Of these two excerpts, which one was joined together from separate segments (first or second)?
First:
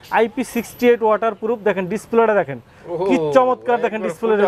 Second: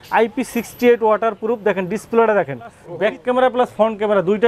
second